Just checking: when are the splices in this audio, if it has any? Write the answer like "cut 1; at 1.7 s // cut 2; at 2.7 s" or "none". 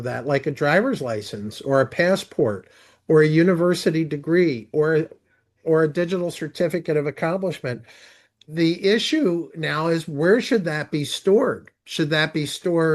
cut 1; at 8.4 s